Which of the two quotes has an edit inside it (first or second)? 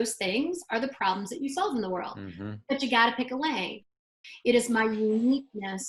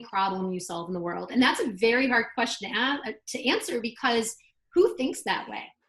first